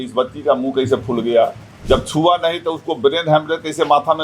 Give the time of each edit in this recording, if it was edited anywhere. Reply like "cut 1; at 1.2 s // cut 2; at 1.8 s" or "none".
cut 1; at 1.7 s